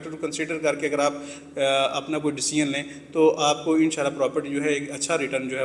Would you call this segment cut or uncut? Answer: uncut